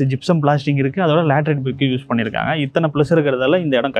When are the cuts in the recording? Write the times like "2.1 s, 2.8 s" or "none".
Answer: none